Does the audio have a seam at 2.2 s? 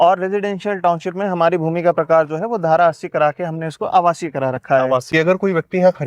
no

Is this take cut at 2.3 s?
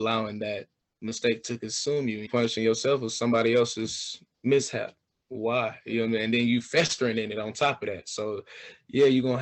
yes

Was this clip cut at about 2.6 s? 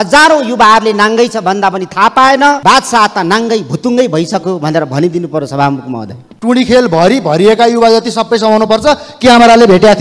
yes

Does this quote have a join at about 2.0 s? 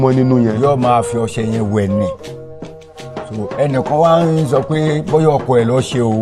no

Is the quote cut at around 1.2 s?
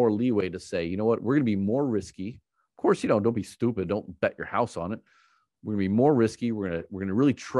no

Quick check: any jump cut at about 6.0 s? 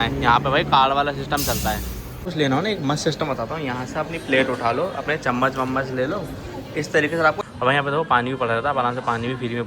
no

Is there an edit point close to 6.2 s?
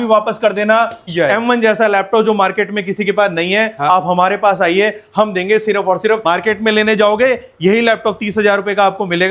yes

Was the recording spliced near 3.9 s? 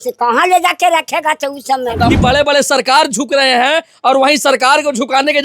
no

